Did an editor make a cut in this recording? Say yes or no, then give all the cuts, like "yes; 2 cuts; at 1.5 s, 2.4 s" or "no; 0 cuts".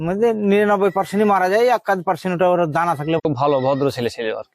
yes; 1 cut; at 3.2 s